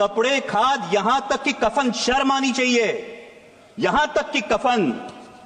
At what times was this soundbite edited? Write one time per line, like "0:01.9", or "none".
none